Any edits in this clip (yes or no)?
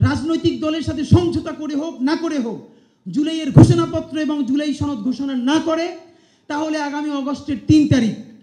no